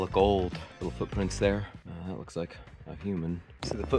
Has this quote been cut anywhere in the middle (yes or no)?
no